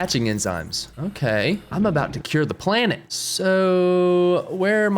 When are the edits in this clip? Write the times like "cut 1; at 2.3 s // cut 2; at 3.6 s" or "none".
cut 1; at 3.1 s